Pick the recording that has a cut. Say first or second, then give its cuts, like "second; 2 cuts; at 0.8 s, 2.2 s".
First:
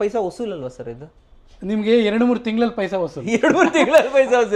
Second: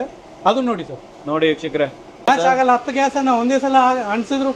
second; 1 cut; at 2.3 s